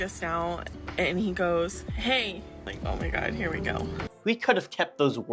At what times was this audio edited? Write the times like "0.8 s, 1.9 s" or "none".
2.7 s, 4.1 s